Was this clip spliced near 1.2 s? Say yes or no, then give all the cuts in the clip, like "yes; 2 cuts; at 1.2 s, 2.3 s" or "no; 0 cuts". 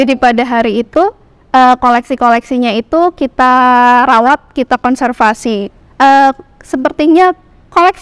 no; 1 cut; at 5.7 s